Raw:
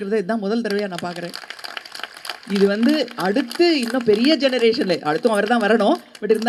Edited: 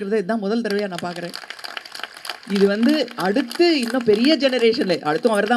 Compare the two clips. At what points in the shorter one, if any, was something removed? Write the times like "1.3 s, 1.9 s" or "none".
none

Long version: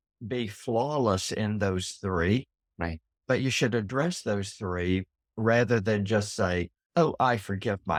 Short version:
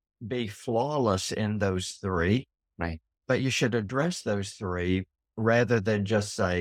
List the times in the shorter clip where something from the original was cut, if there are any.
none

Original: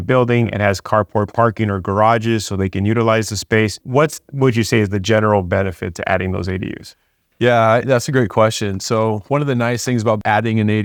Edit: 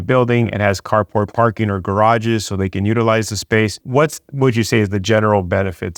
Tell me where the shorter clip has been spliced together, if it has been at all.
none

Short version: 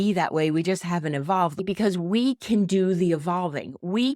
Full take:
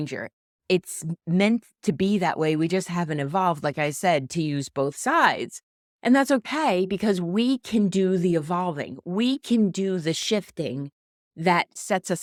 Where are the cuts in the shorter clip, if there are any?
1.6 s

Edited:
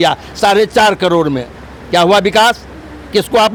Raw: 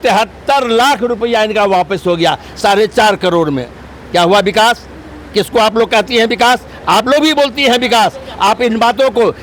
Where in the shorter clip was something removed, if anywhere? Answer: none

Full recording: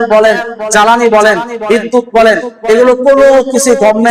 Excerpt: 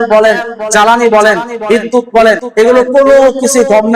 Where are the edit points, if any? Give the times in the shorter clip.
2.5 s

